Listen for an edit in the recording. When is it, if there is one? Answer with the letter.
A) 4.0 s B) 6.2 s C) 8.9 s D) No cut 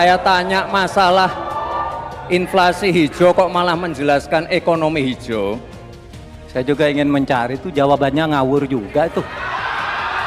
B